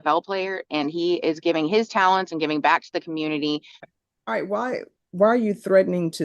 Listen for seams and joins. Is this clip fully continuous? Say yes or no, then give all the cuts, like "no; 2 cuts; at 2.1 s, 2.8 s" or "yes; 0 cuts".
no; 1 cut; at 3.7 s